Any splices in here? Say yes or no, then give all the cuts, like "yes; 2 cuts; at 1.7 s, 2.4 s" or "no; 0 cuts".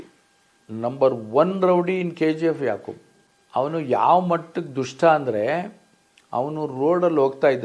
yes; 1 cut; at 3.1 s